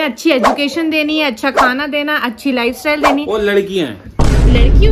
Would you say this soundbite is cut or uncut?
uncut